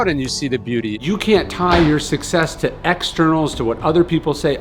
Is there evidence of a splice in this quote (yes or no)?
yes